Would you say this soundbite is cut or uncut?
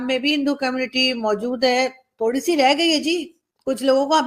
uncut